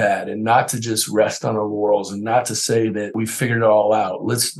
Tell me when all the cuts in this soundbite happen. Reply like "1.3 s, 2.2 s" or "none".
3.2 s

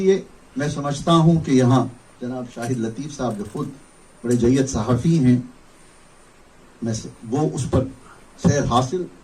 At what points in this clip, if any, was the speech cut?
5.3 s

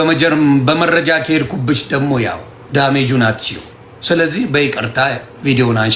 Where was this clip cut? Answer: 2.5 s

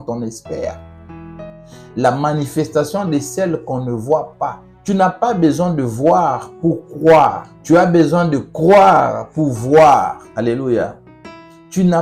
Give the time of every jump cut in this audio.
4.7 s, 7.5 s, 10.2 s

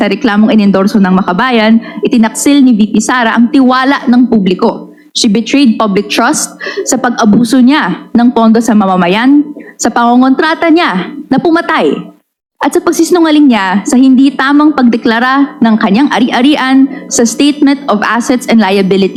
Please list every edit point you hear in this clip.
none

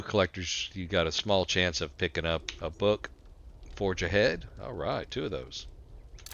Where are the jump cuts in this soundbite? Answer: 2.6 s

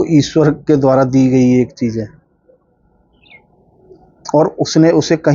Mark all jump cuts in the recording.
none

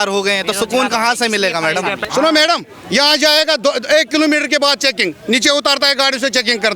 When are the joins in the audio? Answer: 2.0 s

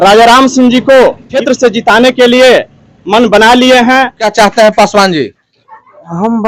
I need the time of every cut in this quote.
1.3 s, 4.2 s

